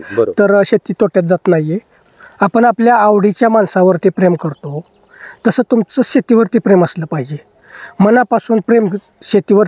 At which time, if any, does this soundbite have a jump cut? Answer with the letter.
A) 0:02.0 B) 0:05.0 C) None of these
A